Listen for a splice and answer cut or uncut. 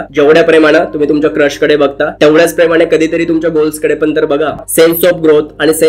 cut